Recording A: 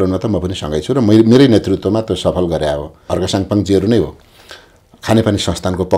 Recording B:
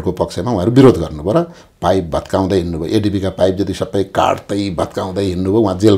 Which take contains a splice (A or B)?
A